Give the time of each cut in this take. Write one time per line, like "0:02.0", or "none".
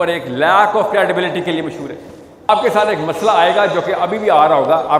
0:02.5

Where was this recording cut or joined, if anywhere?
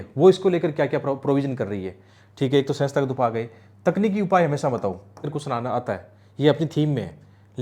0:05.3

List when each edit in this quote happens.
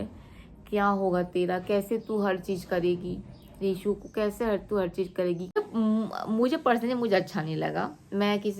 0:05.5

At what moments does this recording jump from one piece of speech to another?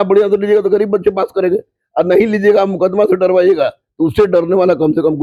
none

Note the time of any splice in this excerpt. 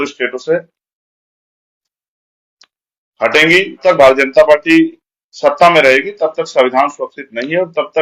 0:03.8

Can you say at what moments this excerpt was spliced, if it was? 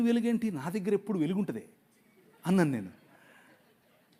none

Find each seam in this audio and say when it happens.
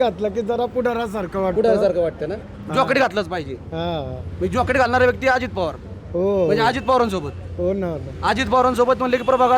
none

